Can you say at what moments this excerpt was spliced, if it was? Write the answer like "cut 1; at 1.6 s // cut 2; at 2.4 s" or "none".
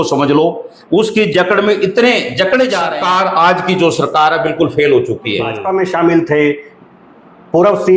cut 1; at 2.9 s // cut 2; at 5.6 s